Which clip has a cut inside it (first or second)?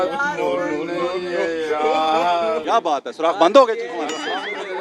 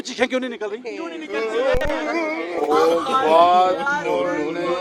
second